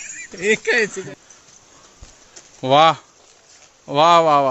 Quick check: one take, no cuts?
no; 1 cut; at 1.0 s

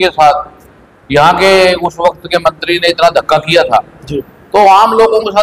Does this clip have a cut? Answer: no; 0 cuts

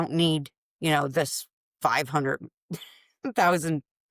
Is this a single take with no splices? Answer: yes; 0 cuts

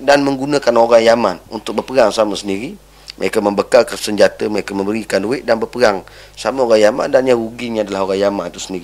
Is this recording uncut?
no; 2 cuts; at 1.5 s, 4.0 s

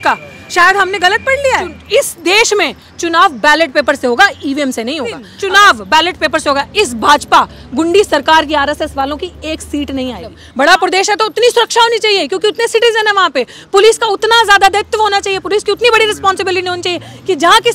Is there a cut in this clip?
yes; 3 cuts; at 1.8 s, 5.3 s, 10.4 s

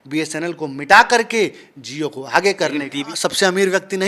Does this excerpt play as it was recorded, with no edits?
no; 1 cut; at 3.0 s

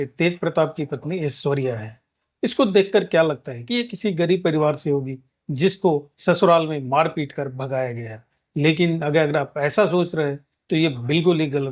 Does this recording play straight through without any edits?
yes; 0 cuts

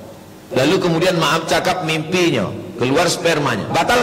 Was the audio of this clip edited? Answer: no; 0 cuts

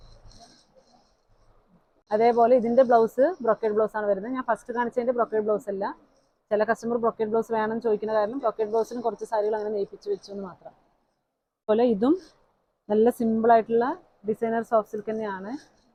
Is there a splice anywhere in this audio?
no; 0 cuts

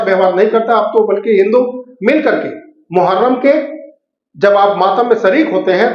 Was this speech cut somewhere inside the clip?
no; 0 cuts

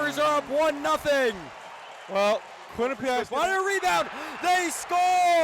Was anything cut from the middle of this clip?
yes; 1 cut; at 3.2 s

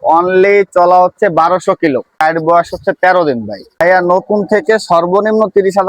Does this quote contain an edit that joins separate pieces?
yes; 2 cuts; at 2.2 s, 3.8 s

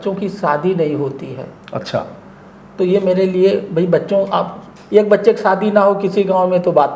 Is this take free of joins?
yes; 0 cuts

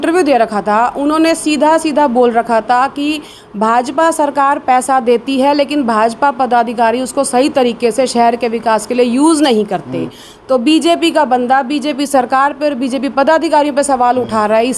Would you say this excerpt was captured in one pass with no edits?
yes; 0 cuts

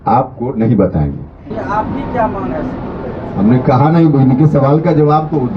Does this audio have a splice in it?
yes; 1 cut; at 1.5 s

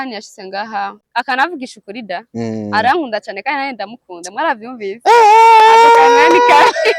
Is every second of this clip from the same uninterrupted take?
no; 1 cut; at 1.0 s

